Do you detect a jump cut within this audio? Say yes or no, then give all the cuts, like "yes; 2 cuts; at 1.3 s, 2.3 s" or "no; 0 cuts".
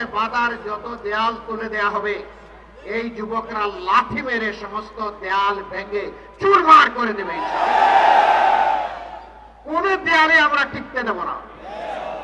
no; 0 cuts